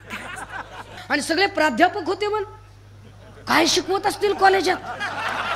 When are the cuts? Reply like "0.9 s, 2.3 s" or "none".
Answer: 1.0 s